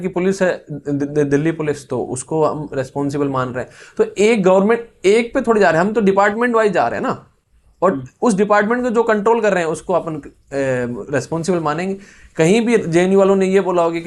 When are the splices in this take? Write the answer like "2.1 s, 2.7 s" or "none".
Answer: none

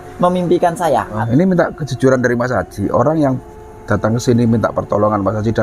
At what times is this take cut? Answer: 1.2 s

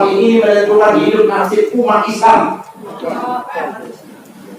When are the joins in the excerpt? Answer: 2.9 s

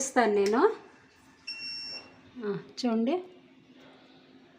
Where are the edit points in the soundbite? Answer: 2.5 s

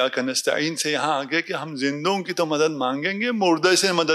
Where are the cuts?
none

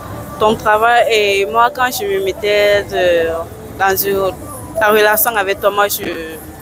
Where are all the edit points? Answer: none

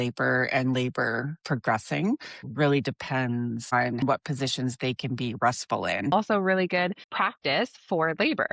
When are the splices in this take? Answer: 2.4 s, 3.9 s, 6.1 s, 7.1 s

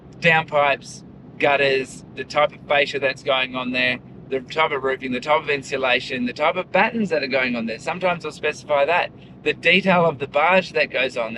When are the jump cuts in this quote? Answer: none

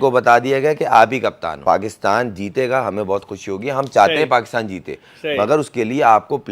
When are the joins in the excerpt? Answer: 1.5 s

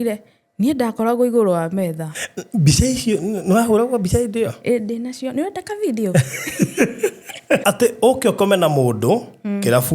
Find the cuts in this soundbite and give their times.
7.6 s

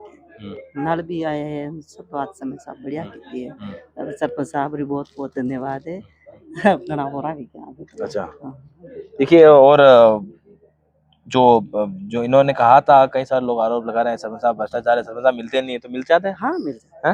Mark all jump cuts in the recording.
none

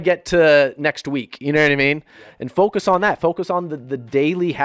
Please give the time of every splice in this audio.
none

